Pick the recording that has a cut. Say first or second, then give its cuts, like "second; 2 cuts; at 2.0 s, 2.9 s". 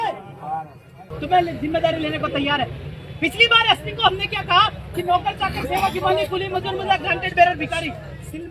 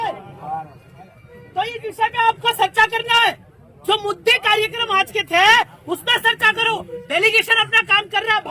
first; 1 cut; at 1.1 s